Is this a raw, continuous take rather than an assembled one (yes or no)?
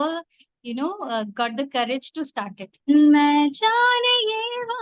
no